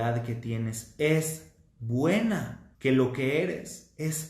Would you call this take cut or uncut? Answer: cut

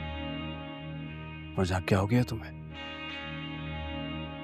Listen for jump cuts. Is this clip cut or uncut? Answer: uncut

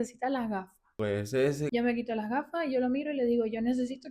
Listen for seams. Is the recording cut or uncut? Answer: cut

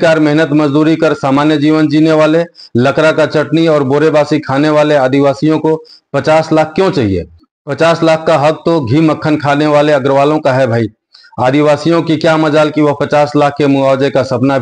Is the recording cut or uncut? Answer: uncut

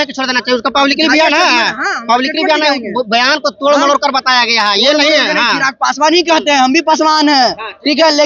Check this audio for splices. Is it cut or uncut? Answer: uncut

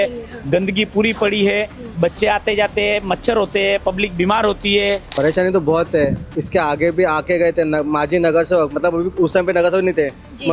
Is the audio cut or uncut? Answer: cut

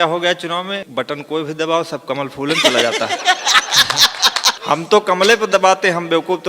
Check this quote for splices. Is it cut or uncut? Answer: cut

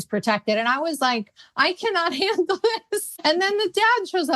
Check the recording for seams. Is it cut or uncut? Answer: cut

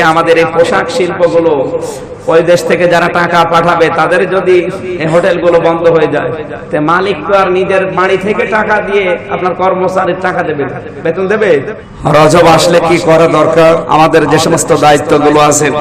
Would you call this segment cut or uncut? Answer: cut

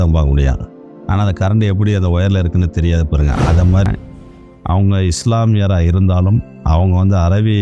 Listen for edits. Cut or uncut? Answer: cut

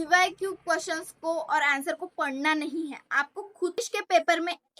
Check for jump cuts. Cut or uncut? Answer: cut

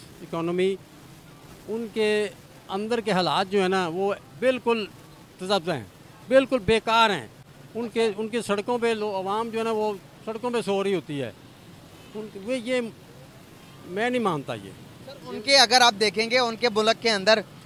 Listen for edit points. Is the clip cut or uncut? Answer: uncut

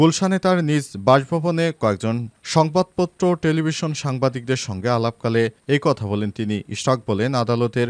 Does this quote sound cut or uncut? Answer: uncut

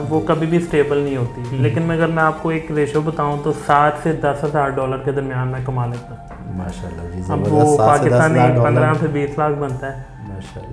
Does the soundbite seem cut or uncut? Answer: uncut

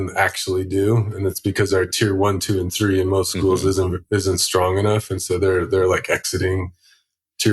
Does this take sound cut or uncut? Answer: uncut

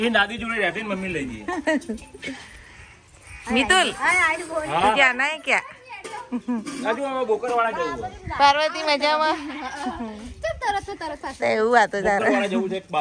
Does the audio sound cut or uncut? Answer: uncut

